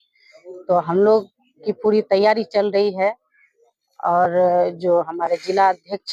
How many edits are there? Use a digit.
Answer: 0